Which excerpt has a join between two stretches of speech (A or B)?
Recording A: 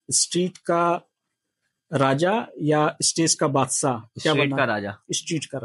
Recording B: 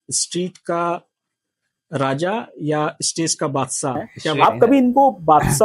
B